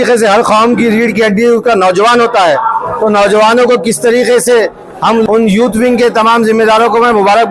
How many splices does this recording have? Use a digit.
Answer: 1